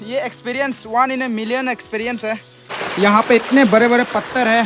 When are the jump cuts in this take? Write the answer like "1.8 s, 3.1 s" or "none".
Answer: 2.6 s